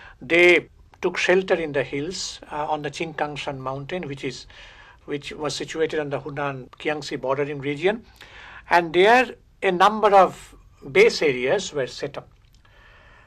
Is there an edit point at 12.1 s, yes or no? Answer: no